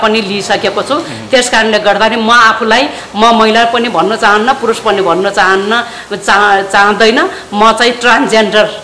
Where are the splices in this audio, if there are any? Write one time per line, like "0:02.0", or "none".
none

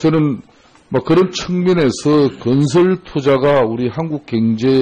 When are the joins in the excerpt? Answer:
0:02.0

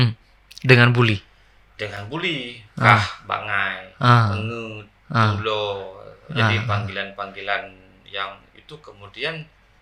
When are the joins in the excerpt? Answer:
none

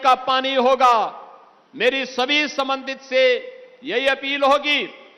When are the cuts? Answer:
none

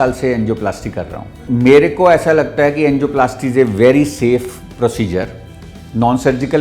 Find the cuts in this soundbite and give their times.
0:01.4

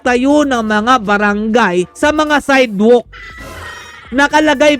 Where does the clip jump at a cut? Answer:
none

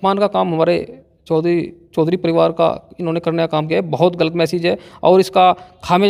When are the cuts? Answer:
none

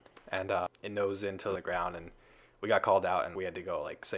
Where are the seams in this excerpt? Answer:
0:01.6
0:03.3

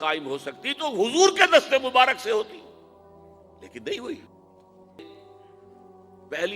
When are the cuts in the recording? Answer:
0:05.1

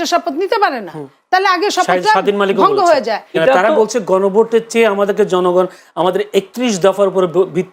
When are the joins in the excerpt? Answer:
0:03.3

